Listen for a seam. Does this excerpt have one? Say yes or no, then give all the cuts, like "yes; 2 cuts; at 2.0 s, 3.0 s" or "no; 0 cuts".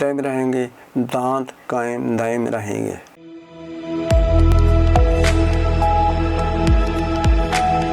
yes; 1 cut; at 3.1 s